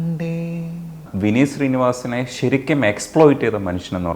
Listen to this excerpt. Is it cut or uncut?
cut